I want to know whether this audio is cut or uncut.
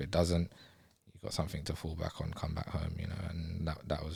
uncut